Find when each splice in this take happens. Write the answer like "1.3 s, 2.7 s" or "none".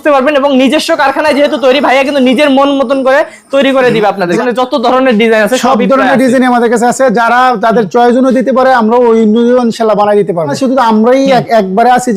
4.4 s, 10.5 s